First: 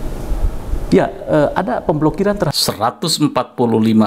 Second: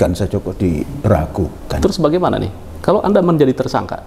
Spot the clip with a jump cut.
first; 1 cut; at 2.5 s

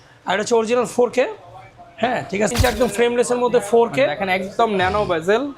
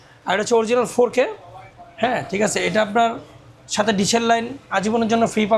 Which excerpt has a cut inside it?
first; 1 cut; at 2.5 s

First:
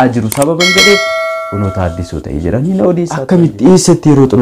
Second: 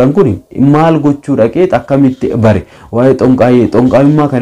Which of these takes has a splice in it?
first; 1 cut; at 3.1 s

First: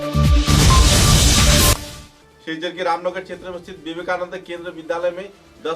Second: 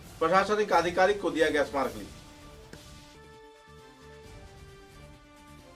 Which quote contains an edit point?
first; 1 cut; at 1.7 s

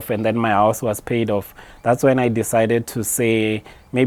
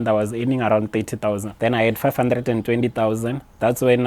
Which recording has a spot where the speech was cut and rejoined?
second; 1 cut; at 1.5 s

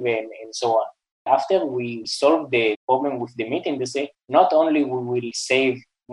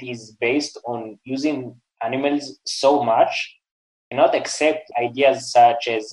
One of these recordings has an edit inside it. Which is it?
first; 5 cuts; at 1.2 s, 2.0 s, 2.8 s, 4.2 s, 5.3 s

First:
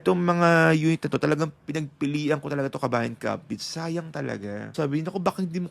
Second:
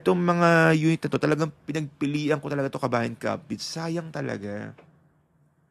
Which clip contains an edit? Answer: first; 1 cut; at 4.7 s

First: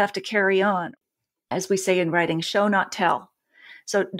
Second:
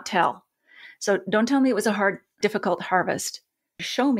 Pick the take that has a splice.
first; 1 cut; at 0.9 s

